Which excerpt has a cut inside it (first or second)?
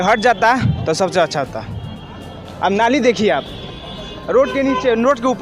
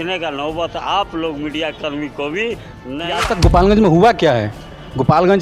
second